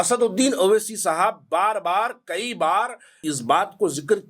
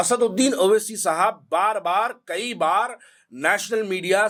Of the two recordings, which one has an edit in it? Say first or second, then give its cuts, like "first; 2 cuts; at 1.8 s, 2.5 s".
first; 1 cut; at 3.2 s